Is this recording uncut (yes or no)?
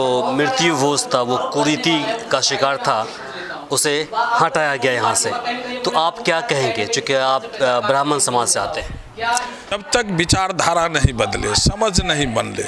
no